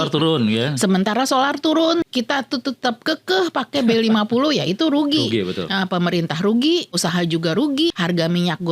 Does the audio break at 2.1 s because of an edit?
yes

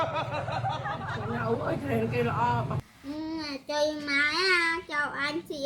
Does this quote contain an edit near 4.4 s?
no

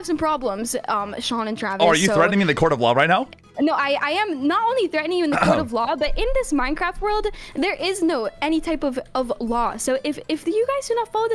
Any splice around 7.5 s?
no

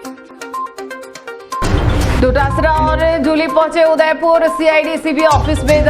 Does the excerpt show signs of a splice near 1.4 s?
yes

